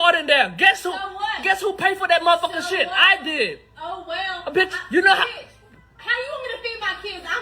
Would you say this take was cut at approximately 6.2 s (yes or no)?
no